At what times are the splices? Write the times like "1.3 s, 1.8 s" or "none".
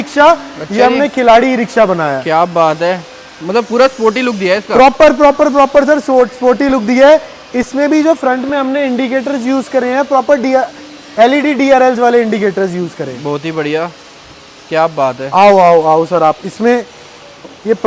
none

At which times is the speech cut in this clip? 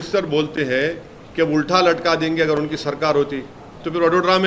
none

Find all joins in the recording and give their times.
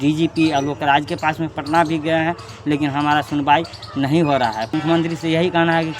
4.6 s

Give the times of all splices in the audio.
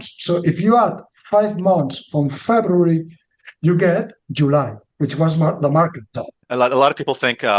6.4 s

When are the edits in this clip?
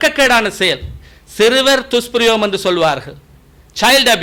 none

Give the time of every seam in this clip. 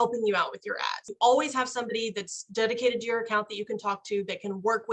1.1 s

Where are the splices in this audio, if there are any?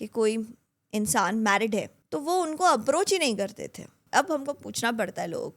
2.0 s, 3.9 s

